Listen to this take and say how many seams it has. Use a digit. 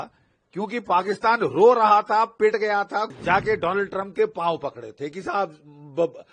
1